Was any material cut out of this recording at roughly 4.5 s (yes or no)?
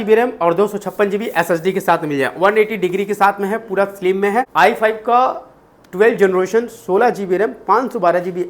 yes